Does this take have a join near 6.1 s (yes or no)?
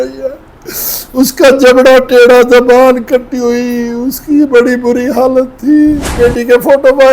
yes